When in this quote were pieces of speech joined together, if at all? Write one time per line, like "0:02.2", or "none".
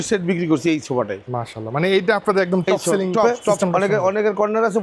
0:03.4